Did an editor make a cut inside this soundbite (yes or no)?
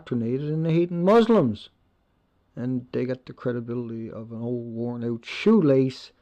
no